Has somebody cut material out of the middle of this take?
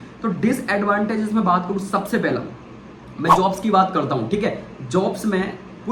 no; 0 cuts

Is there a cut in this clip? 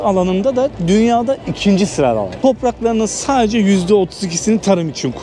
no; 0 cuts

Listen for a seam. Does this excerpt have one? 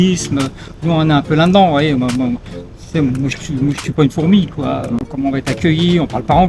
yes; 1 cut; at 5.1 s

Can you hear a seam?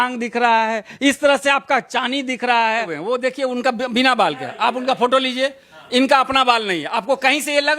yes; 1 cut; at 2.9 s

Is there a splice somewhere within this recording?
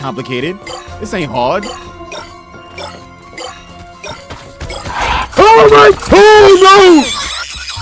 yes; 1 cut; at 6.0 s

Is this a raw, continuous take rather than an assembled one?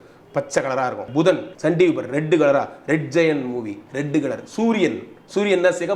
no; 1 cut; at 1.2 s

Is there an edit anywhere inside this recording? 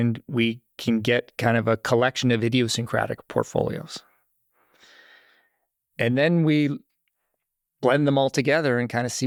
no; 0 cuts

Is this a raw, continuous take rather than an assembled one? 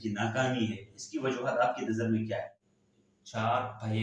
no; 1 cut; at 2.6 s

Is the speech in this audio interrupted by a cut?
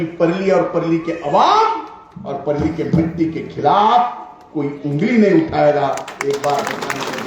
no; 0 cuts

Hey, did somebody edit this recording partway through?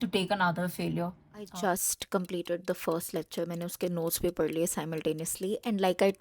yes; 1 cut; at 1.5 s

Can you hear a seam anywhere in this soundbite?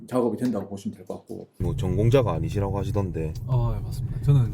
yes; 1 cut; at 1.6 s

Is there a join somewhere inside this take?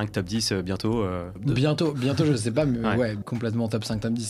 yes; 2 cuts; at 1.3 s, 3.2 s

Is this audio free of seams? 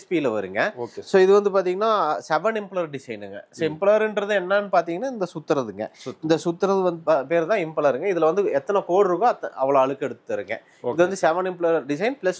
yes; 0 cuts

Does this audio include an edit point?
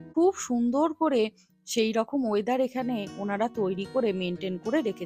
no; 0 cuts

